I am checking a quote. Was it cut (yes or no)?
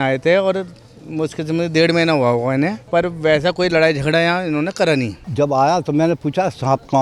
yes